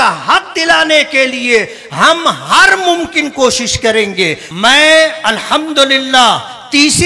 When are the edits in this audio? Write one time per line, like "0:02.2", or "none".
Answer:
0:04.4